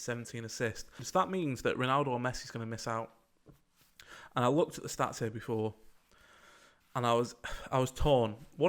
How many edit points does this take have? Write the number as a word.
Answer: one